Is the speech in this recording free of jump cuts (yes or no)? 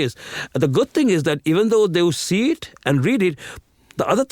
yes